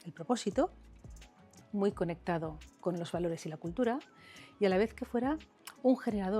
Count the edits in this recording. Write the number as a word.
zero